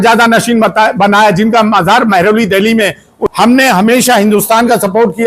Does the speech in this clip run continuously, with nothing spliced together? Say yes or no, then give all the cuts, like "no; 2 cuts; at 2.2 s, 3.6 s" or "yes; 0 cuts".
no; 1 cut; at 3.1 s